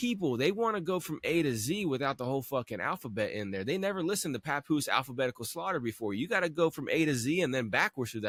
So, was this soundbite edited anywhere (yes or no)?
no